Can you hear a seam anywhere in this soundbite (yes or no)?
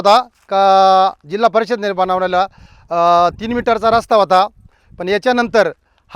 no